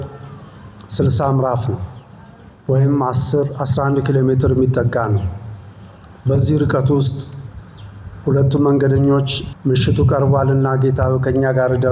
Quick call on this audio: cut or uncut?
cut